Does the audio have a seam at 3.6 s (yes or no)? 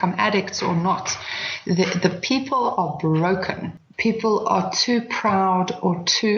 yes